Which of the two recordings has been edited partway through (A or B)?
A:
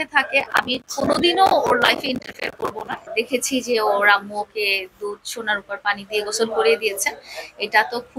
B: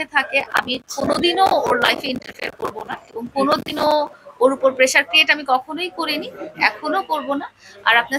A